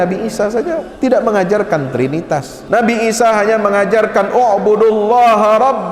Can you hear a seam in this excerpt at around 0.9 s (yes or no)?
yes